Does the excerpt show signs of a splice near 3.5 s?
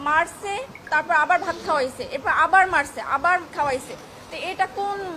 no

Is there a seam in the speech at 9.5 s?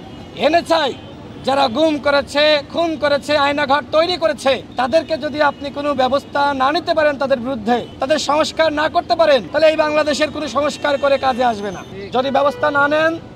yes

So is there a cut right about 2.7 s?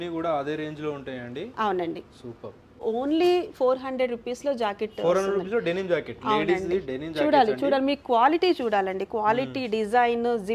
yes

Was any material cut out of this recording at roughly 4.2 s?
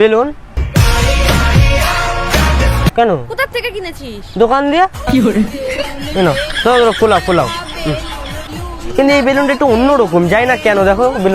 no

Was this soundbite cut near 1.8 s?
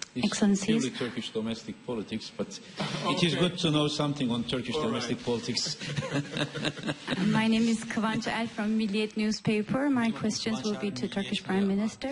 yes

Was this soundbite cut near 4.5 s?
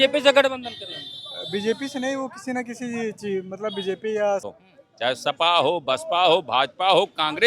yes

